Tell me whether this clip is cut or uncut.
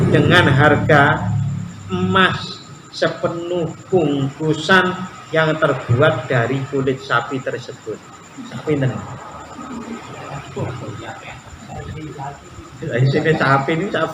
uncut